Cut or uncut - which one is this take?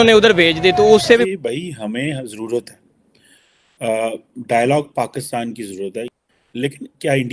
cut